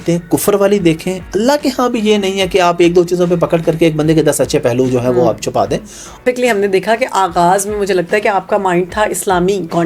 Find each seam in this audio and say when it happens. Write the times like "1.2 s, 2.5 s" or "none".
1.1 s, 6.2 s